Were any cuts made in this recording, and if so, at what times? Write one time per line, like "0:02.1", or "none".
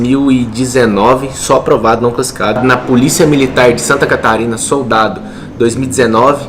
0:02.6